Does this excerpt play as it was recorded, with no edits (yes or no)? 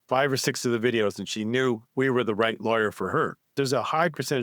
no